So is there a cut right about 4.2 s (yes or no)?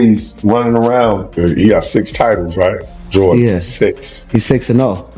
no